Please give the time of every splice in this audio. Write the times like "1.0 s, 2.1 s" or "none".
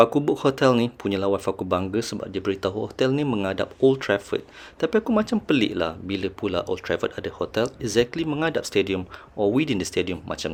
none